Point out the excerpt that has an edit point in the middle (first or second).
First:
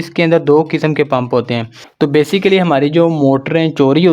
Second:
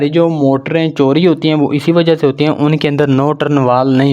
first